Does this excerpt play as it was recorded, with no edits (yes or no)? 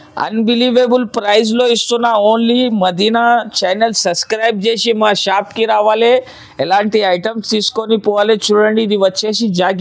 yes